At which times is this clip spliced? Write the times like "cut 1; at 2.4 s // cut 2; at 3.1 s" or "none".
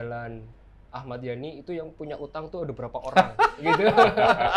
none